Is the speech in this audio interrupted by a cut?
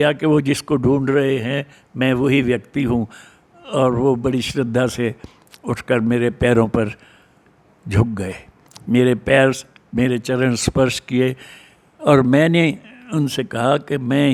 no; 0 cuts

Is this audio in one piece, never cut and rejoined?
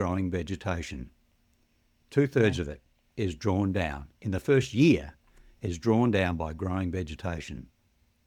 yes; 0 cuts

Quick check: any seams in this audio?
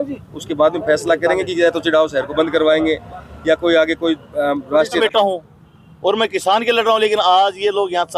yes; 1 cut; at 5.0 s

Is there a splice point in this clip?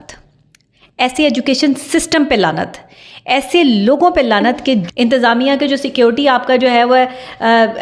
yes; 1 cut; at 4.8 s

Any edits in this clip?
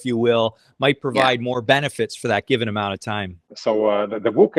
no; 0 cuts

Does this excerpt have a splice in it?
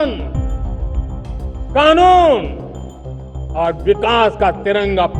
no; 0 cuts

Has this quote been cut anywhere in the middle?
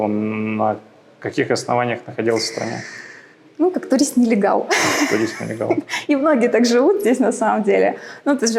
no; 0 cuts

